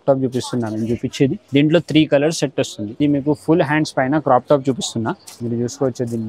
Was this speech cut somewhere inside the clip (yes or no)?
yes